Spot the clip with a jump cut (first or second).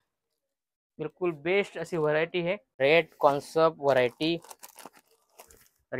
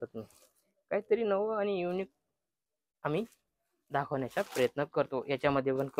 first